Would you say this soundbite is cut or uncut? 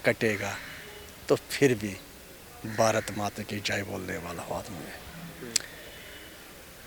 uncut